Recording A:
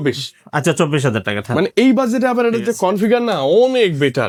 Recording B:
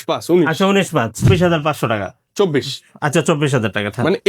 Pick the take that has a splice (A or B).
B